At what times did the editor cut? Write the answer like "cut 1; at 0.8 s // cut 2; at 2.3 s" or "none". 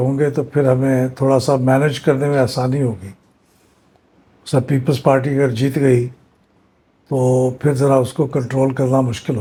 none